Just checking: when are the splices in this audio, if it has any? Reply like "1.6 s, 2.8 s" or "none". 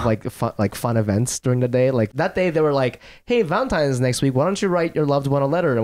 2.1 s